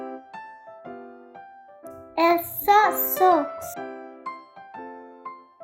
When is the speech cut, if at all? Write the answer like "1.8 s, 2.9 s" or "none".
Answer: 2.1 s, 3.5 s

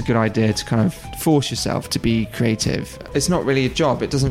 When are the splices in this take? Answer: 1.1 s, 3.0 s

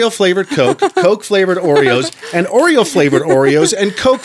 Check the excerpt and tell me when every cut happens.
none

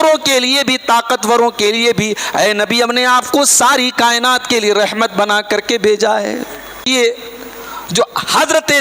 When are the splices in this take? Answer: 6.8 s

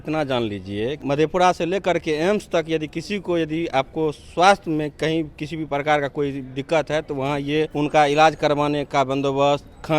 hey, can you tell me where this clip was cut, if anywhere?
1.0 s, 7.7 s

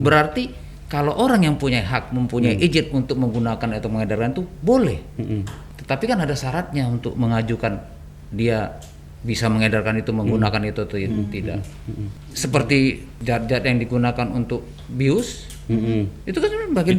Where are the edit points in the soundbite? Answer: none

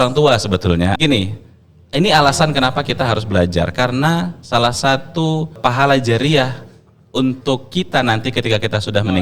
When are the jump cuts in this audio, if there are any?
1.0 s, 5.6 s

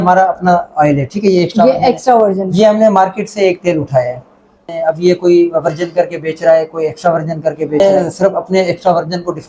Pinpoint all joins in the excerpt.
4.6 s, 7.8 s

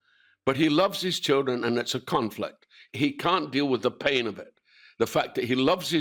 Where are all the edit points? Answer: 3.1 s

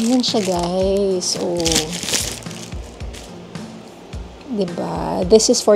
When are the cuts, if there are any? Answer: none

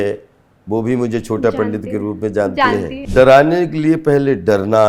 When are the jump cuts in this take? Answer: 2.9 s

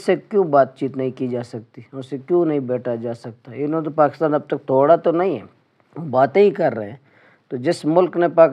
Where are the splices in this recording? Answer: none

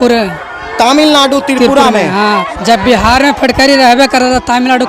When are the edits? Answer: 2.6 s

